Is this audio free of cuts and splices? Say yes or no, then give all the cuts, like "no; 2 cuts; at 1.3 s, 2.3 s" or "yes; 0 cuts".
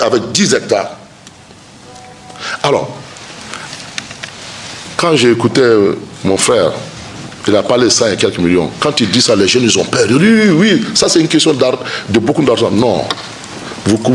yes; 0 cuts